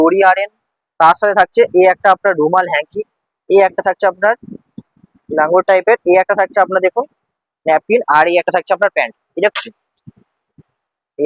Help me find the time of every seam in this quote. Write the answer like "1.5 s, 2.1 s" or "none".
9.5 s